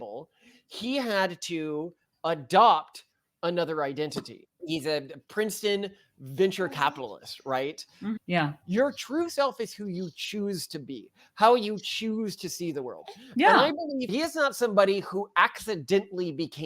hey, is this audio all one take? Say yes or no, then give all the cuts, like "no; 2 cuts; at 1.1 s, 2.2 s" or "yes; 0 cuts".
no; 2 cuts; at 8.2 s, 14.1 s